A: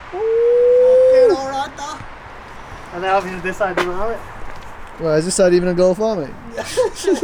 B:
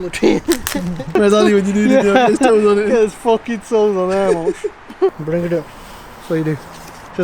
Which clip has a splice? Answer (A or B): B